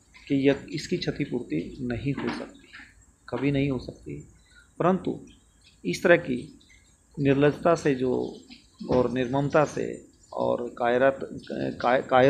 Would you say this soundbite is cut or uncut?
uncut